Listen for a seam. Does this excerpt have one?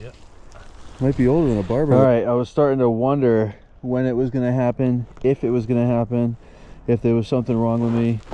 yes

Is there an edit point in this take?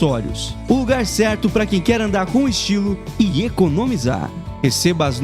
no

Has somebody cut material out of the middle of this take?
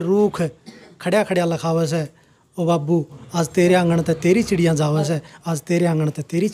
no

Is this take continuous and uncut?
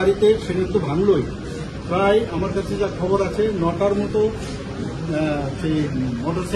yes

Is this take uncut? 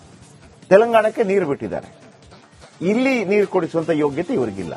yes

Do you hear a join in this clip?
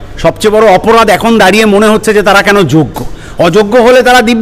no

